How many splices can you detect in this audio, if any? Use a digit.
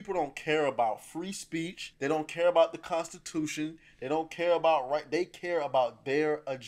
1